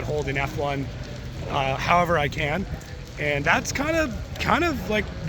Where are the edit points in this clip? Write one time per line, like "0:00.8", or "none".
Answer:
none